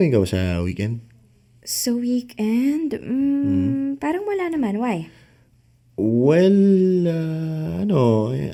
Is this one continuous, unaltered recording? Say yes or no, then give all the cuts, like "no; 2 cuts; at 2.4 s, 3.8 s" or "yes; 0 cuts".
yes; 0 cuts